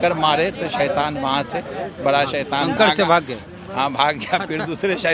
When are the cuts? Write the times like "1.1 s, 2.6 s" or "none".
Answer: none